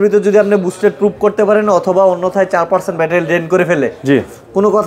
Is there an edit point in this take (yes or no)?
no